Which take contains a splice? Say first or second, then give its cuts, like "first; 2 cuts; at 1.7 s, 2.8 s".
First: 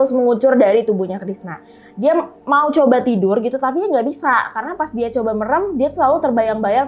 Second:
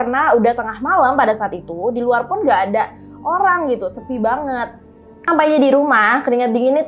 second; 1 cut; at 5.3 s